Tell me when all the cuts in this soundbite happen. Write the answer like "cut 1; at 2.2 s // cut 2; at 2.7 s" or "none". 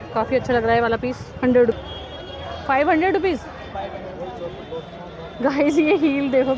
none